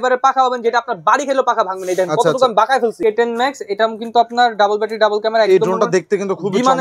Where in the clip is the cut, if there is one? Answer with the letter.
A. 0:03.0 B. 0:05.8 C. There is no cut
A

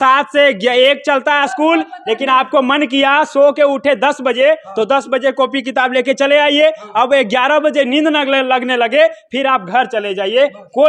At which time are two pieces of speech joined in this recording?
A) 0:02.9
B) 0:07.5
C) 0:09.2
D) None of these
D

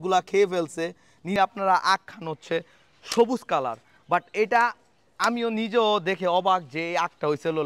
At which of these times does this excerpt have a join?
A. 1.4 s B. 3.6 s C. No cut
A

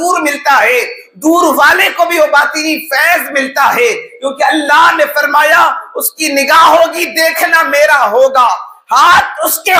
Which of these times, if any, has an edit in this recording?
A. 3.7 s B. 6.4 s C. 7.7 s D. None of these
D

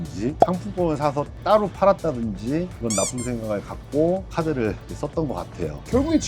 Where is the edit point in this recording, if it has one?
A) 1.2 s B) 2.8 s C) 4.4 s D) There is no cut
B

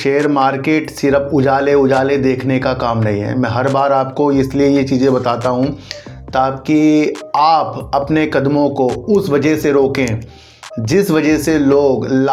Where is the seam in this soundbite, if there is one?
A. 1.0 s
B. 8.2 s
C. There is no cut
C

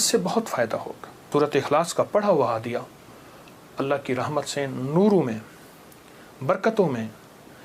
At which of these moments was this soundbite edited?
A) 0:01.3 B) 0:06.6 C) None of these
A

